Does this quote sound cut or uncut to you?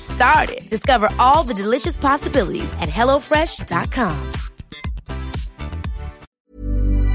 cut